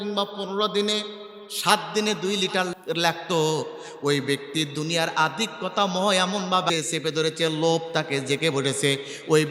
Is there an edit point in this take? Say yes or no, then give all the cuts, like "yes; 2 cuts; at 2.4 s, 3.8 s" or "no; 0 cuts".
yes; 1 cut; at 6.7 s